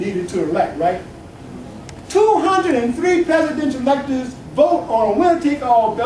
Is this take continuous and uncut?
yes; 0 cuts

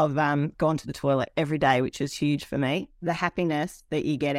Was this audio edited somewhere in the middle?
yes; 1 cut; at 2.9 s

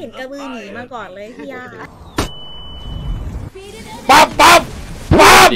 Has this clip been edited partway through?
yes; 1 cut; at 3.5 s

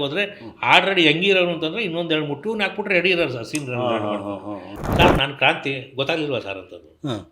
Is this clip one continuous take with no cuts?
no; 1 cut; at 4.7 s

